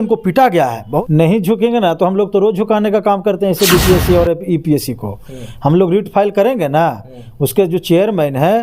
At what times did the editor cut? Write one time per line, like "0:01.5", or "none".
0:01.0

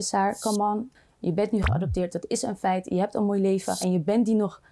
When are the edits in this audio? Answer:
0:00.9

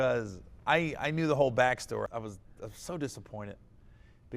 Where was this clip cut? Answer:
0:02.1

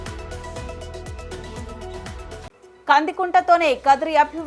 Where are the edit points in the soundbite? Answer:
0:01.8

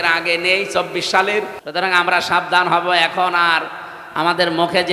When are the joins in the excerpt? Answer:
0:01.6

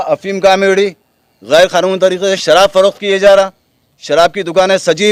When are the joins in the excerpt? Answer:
none

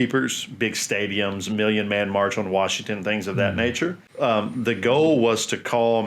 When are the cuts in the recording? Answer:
0:04.0

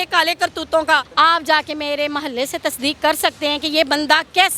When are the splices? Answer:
0:01.1

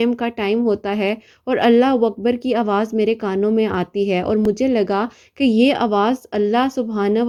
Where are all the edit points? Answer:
none

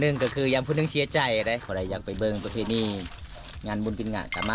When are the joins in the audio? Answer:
0:01.7

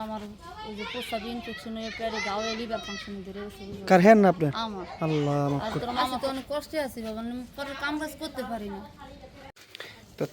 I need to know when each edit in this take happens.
0:05.5
0:09.5

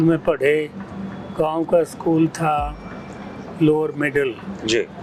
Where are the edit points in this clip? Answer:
none

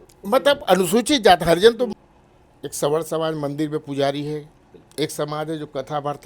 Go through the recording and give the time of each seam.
0:01.9

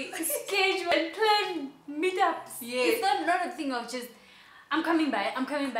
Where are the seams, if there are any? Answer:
0:00.9

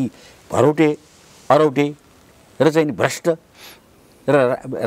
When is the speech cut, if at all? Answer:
none

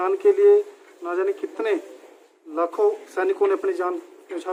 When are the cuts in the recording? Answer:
none

